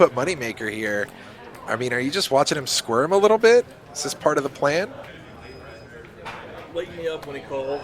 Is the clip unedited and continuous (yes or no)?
no